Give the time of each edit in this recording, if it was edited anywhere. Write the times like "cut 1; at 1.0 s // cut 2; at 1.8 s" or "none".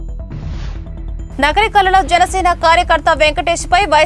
cut 1; at 1.3 s